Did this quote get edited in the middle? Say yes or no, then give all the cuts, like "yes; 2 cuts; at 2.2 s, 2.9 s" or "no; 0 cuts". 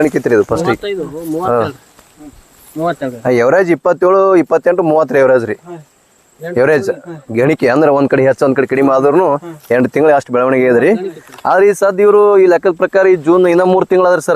no; 0 cuts